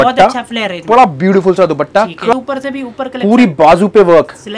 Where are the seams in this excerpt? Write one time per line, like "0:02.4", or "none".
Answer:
0:02.3